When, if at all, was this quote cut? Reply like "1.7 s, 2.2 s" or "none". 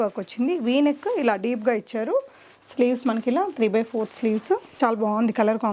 4.7 s